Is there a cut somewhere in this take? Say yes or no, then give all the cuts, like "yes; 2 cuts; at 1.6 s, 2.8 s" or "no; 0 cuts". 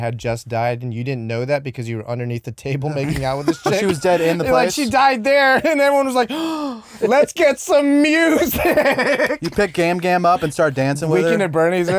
yes; 1 cut; at 6.9 s